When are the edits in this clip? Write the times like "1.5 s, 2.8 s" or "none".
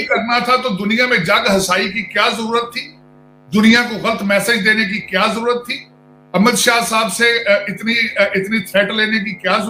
none